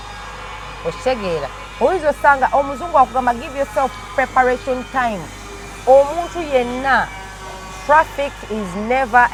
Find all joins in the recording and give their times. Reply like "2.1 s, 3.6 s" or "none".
none